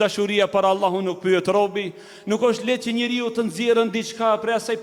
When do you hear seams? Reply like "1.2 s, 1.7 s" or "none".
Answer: none

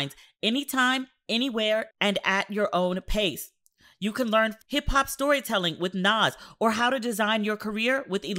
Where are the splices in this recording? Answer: 4.6 s

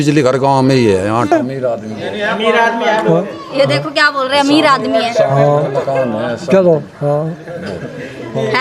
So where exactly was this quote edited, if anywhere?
1.3 s

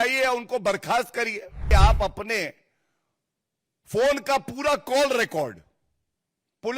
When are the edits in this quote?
1.6 s

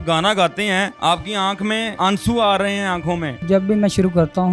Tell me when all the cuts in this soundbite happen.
0.9 s, 1.9 s, 3.4 s

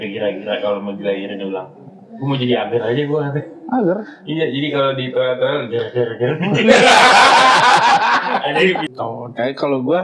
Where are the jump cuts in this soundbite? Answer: 8.8 s

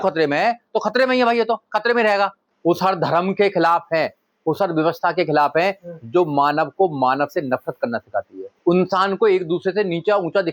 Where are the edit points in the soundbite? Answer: 2.5 s, 8.5 s

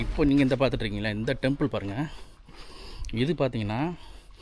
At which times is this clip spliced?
none

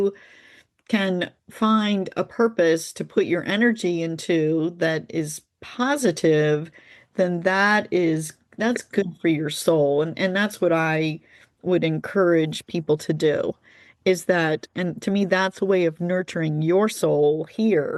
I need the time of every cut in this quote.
none

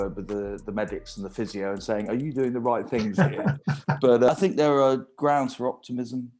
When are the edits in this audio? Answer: 4.3 s

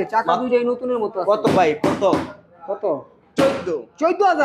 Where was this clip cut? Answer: none

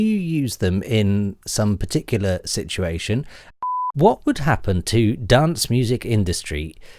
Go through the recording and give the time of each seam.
3.5 s

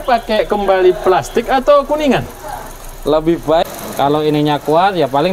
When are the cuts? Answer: 3.6 s

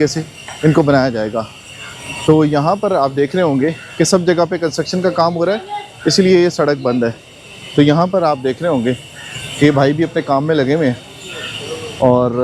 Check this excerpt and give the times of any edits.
none

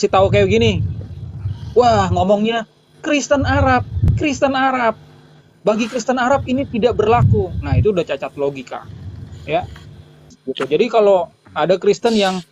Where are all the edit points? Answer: 10.2 s

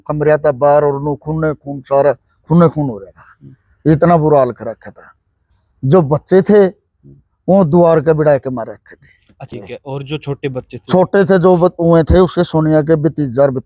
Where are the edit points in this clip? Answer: 9.5 s

